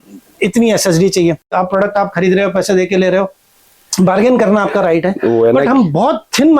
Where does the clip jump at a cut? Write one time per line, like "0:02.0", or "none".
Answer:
0:01.5